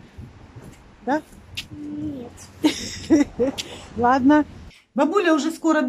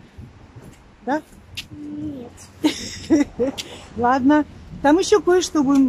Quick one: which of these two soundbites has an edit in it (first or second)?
first